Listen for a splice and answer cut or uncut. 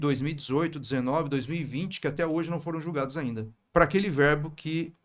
cut